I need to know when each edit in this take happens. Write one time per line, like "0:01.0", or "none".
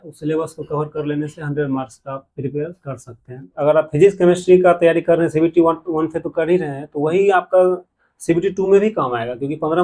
0:03.5

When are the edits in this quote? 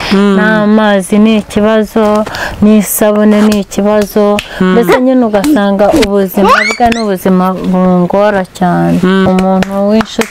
0:09.3

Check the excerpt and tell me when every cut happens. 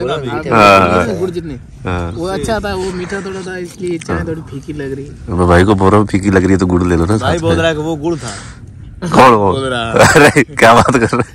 none

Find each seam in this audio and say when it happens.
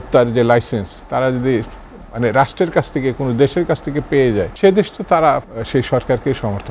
0:04.5
0:05.6

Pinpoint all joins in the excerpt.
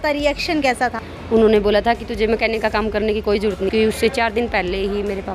0:01.1
0:03.7

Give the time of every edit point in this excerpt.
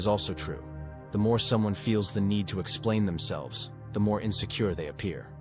none

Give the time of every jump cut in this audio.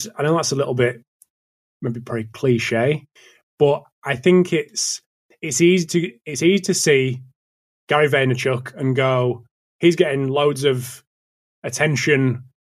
none

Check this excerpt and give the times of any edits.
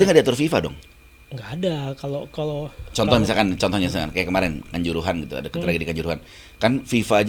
none

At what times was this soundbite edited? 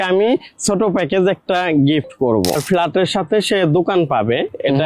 0:02.6

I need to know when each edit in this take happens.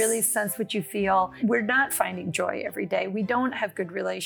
0:01.4

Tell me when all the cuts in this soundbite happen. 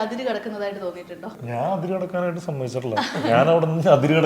0:01.4

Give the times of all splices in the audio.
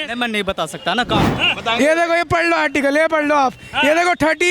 0:01.4

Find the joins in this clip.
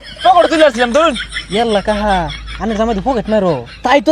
0:01.3

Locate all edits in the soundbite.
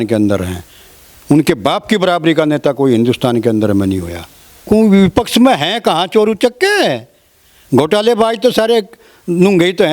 0:04.7

